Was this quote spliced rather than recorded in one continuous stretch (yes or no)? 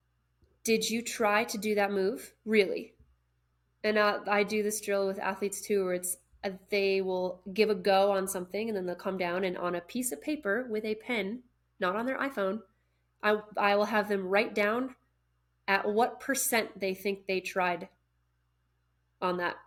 no